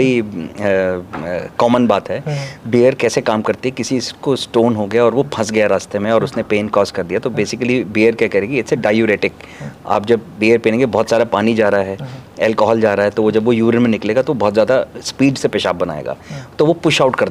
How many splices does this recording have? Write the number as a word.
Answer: zero